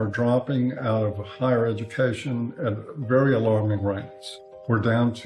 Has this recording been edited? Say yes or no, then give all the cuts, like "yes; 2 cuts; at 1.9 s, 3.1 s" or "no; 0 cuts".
no; 0 cuts